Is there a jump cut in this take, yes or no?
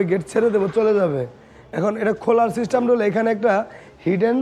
no